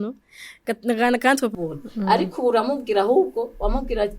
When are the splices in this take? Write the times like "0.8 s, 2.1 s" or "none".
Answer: 1.5 s

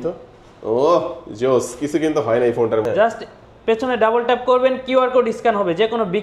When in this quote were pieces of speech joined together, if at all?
2.8 s

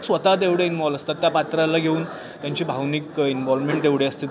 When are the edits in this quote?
none

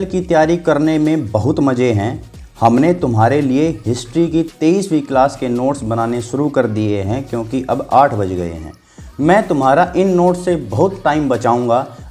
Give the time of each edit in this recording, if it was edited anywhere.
none

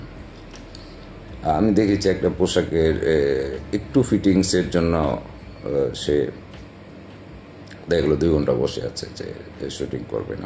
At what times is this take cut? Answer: none

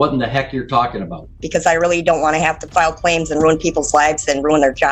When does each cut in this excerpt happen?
1.4 s

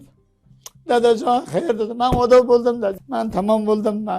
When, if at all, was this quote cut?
3.0 s

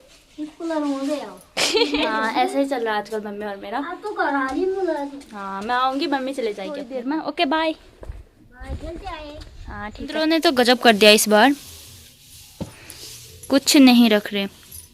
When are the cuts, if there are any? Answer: 1.9 s, 6.9 s, 10.2 s

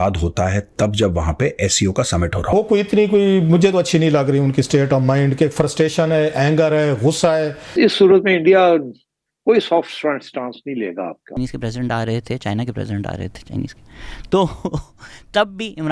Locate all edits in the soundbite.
2.5 s, 11.4 s

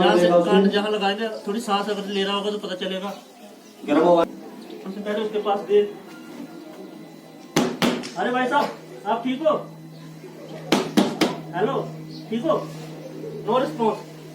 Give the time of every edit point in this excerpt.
4.2 s

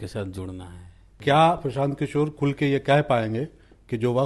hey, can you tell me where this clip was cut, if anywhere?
1.1 s

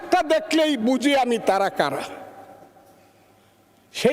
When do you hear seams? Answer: none

